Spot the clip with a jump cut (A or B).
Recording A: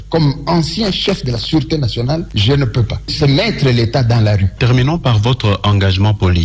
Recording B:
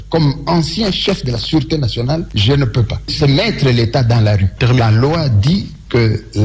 B